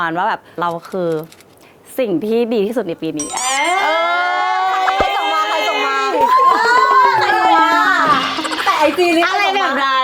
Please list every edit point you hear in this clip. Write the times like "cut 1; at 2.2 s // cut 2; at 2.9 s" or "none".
none